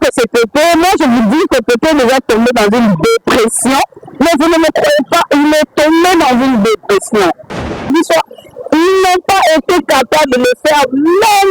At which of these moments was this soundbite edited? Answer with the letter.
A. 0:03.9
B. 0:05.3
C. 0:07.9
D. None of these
C